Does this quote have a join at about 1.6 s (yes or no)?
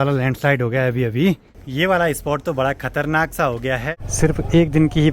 yes